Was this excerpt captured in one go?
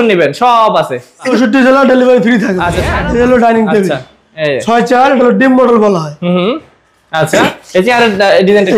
no; 2 cuts; at 1.2 s, 2.9 s

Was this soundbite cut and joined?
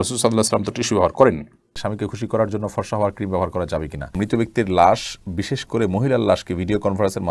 yes; 2 cuts; at 1.7 s, 4.1 s

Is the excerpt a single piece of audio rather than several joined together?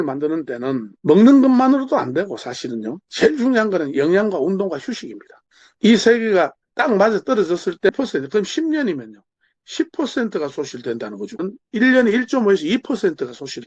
no; 3 cuts; at 3.0 s, 7.9 s, 11.4 s

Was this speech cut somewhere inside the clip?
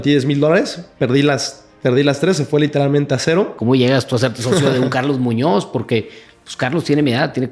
yes; 1 cut; at 3.6 s

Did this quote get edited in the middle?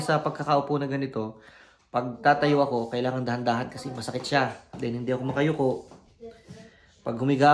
no; 0 cuts

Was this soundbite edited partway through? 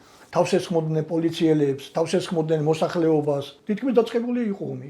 yes; 1 cut; at 3.5 s

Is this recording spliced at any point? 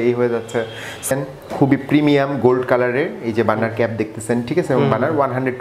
yes; 1 cut; at 1.1 s

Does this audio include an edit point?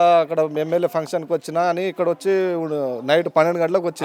no; 0 cuts

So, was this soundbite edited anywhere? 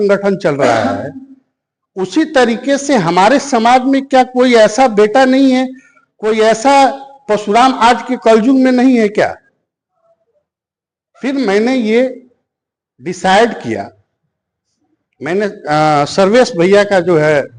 no; 0 cuts

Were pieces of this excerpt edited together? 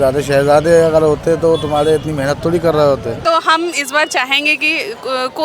yes; 1 cut; at 3.2 s

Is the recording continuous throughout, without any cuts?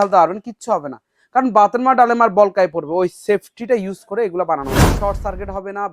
no; 1 cut; at 4.9 s

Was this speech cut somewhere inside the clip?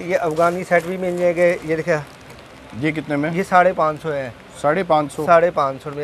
no; 0 cuts

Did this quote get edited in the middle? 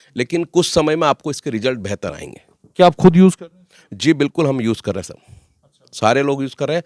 no; 0 cuts

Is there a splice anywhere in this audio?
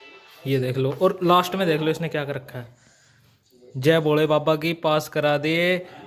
no; 0 cuts

